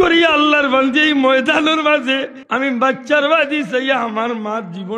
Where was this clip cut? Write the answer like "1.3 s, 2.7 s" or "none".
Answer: 2.4 s

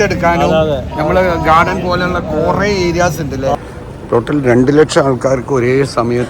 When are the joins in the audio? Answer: 3.5 s

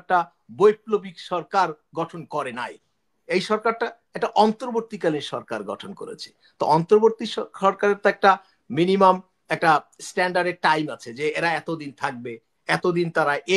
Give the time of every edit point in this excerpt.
none

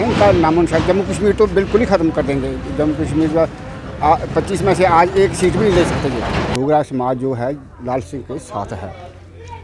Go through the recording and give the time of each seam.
6.5 s

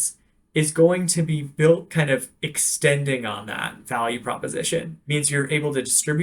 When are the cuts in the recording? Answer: 5.0 s

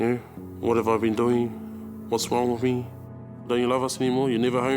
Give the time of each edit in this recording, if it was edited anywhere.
3.1 s

